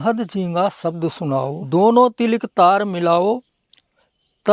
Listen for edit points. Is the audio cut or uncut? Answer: cut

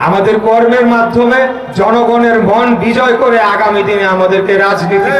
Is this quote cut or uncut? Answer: uncut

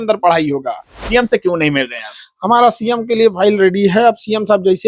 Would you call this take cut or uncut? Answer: cut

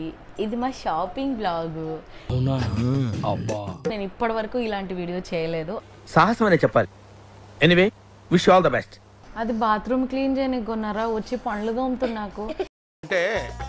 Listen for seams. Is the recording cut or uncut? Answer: cut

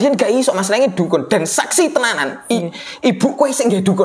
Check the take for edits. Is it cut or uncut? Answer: uncut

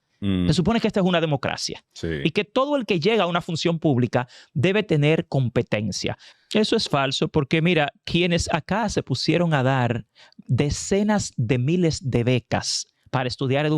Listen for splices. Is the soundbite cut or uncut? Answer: cut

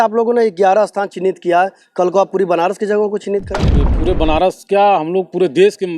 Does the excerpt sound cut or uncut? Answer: cut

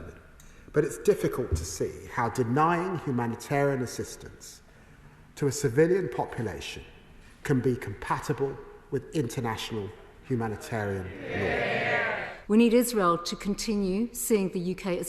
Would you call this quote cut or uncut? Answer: cut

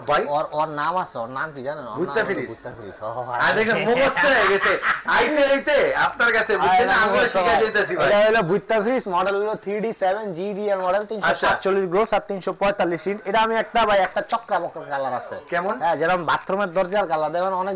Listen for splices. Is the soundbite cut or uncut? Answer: uncut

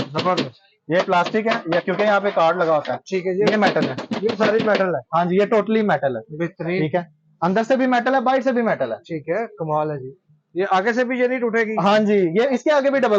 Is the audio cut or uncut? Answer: uncut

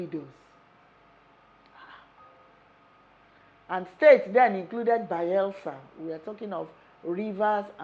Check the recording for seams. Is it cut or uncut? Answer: uncut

